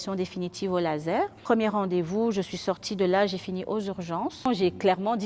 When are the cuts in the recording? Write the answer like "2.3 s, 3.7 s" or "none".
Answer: 1.4 s, 4.5 s